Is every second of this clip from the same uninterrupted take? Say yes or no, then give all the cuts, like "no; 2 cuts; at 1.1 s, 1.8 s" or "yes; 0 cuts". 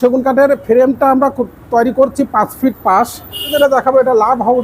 no; 1 cut; at 3.5 s